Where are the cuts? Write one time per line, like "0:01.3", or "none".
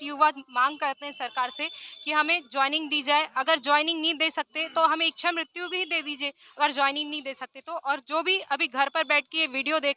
none

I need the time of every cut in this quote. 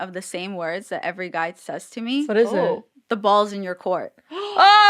0:02.3

